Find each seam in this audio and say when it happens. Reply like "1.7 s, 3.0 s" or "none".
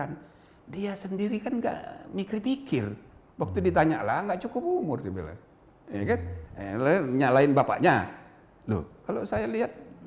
none